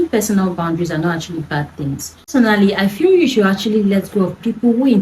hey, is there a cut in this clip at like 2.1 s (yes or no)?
yes